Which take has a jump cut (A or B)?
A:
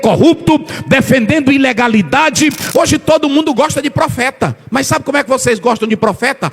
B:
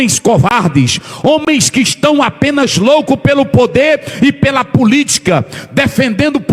A